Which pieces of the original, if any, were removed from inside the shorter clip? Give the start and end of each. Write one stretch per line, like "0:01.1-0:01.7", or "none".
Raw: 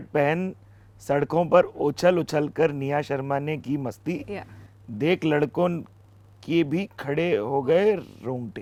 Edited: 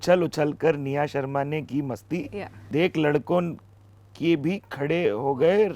0:04.5-0:04.8